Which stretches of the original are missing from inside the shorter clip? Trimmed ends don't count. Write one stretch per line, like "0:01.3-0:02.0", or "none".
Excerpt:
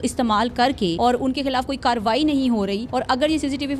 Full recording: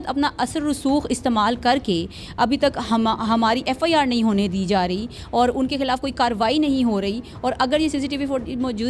0:02.0-0:05.3
0:07.2-0:07.4